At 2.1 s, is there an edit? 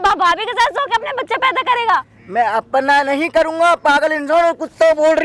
no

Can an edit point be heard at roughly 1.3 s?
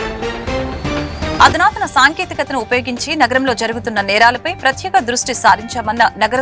yes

